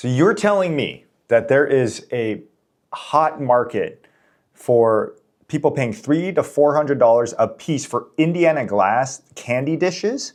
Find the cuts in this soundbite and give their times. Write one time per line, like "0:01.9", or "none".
none